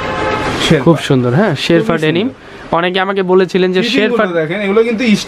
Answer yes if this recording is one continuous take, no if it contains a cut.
yes